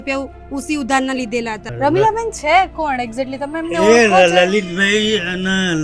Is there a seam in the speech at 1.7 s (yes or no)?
yes